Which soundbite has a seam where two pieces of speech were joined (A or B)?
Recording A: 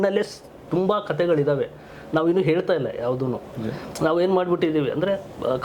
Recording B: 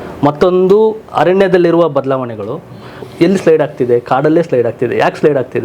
B